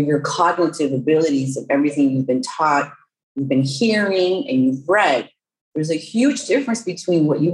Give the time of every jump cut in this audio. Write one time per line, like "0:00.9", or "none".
none